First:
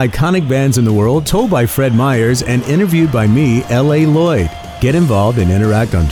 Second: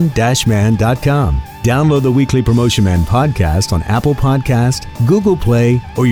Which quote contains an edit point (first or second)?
second